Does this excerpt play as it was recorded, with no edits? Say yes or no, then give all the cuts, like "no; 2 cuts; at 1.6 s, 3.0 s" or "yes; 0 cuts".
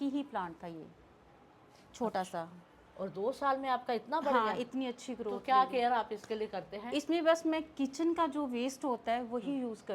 yes; 0 cuts